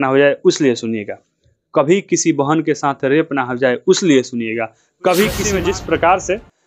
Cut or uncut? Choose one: cut